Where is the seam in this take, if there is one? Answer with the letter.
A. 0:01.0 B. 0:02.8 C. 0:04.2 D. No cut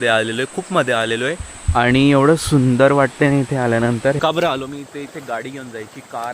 C